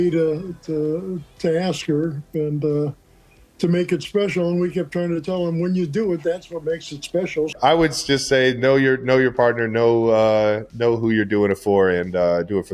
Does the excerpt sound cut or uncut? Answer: cut